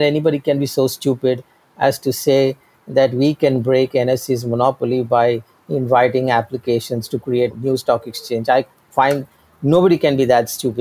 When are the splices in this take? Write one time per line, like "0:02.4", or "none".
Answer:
0:07.5